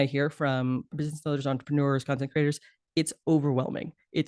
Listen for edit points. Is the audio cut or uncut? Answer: cut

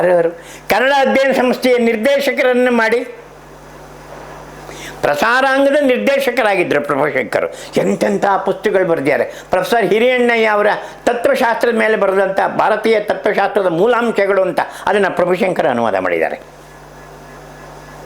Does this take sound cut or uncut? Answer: uncut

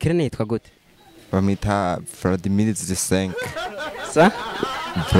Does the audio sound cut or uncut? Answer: uncut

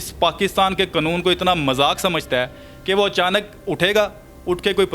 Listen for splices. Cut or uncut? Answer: uncut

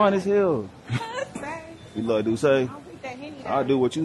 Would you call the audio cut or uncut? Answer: cut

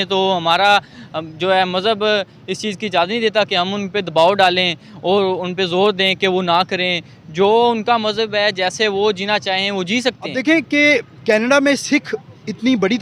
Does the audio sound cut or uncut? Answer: cut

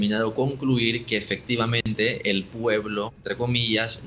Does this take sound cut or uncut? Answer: cut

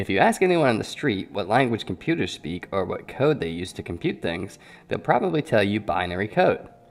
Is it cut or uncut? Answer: uncut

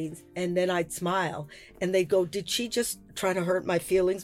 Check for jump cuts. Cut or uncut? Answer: cut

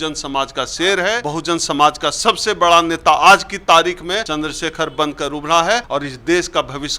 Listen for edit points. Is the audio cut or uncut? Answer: cut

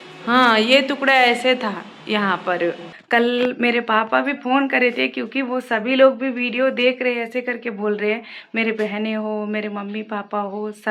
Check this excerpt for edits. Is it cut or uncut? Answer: cut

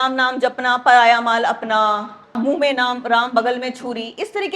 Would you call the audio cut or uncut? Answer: cut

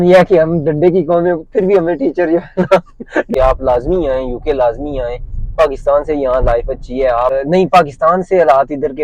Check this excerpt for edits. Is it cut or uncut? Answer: cut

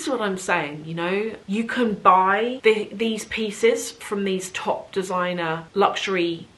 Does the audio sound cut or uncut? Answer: cut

